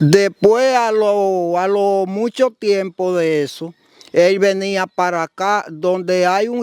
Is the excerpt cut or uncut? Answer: uncut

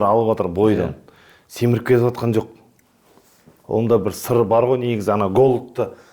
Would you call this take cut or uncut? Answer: uncut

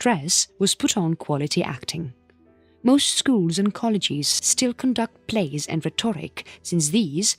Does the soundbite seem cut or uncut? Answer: cut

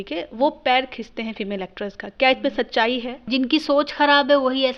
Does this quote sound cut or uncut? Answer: cut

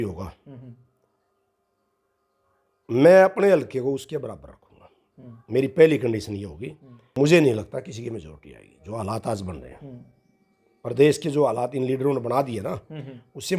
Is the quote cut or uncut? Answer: cut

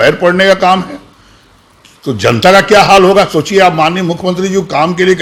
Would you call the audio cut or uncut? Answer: uncut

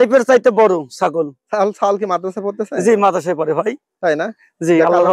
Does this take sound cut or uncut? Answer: uncut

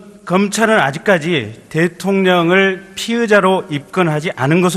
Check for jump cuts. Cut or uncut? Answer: cut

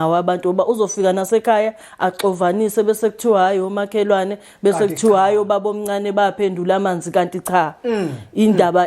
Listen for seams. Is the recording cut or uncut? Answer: uncut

